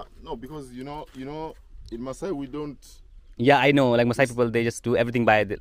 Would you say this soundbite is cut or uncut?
uncut